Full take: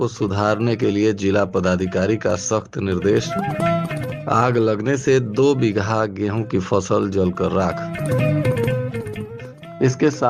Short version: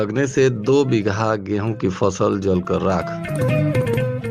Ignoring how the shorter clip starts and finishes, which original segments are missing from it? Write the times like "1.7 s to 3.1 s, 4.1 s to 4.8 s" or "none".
none